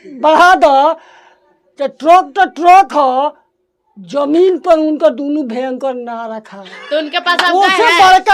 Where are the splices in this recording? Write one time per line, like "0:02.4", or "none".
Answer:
none